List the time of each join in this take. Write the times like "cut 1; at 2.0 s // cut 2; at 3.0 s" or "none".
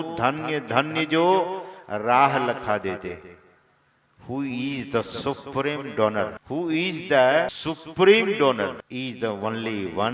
cut 1; at 6.4 s // cut 2; at 7.5 s // cut 3; at 8.8 s